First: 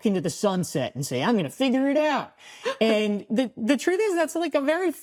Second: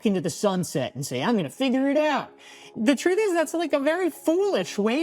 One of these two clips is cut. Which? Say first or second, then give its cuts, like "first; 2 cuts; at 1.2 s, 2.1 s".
second; 1 cut; at 2.7 s